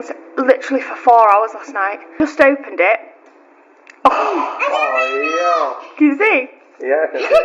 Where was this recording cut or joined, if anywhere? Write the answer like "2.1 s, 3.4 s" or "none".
2.1 s